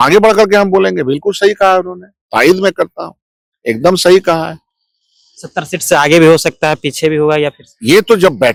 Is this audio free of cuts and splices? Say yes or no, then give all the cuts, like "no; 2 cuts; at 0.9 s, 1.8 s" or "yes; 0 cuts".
yes; 0 cuts